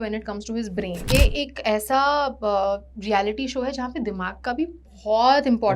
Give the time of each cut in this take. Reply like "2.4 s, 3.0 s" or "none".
1.1 s